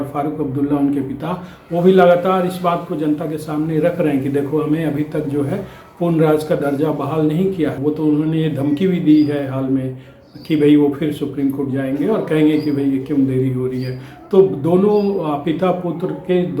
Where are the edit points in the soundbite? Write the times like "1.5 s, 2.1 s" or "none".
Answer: 7.8 s